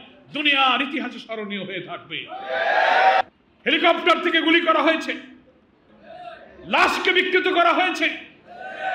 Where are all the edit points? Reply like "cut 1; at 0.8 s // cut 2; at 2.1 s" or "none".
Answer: cut 1; at 3.2 s